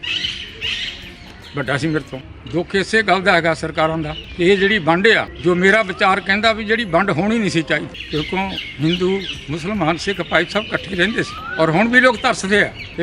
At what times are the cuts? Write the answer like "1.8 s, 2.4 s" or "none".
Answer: 2.1 s